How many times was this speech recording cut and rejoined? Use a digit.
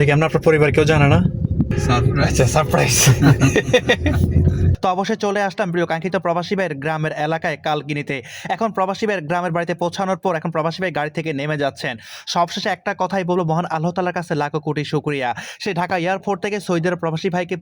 2